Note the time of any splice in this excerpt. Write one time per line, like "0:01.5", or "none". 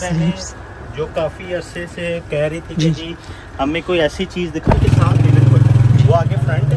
0:04.8

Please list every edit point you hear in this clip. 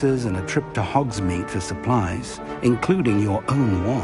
none

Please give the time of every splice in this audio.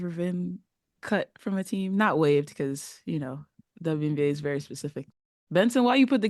0:05.0

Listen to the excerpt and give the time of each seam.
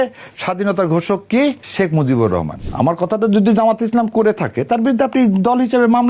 0:01.6
0:02.6

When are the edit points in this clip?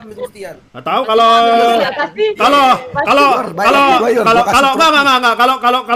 none

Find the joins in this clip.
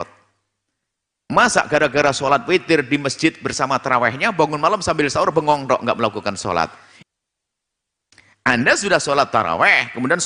0:06.9

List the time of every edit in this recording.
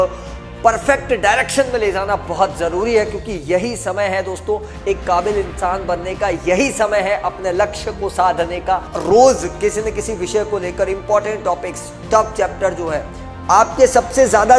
0:08.9

